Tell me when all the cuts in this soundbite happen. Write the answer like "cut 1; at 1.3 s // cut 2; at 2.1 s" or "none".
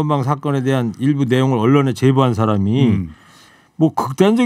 none